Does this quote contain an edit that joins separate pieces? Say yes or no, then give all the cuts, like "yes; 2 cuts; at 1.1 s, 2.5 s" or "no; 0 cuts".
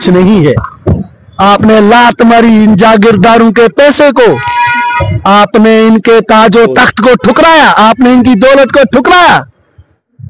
no; 0 cuts